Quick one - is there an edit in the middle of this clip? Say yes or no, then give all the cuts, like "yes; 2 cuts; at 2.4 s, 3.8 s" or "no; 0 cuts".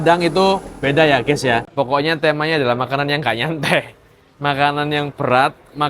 yes; 1 cut; at 1.7 s